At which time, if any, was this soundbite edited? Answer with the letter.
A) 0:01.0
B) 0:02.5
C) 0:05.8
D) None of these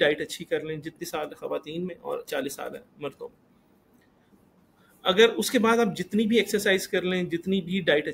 A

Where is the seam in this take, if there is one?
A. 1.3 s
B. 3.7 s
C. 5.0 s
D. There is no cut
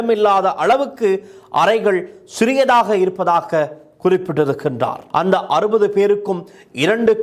C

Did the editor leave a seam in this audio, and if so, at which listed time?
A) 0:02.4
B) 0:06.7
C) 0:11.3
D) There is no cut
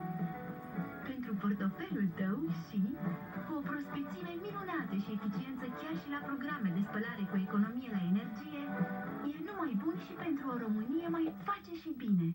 C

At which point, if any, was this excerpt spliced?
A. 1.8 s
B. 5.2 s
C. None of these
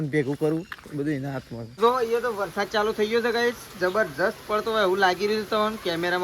A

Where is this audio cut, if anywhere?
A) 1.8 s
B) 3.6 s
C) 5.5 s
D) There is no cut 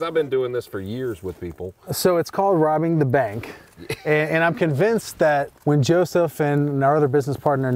C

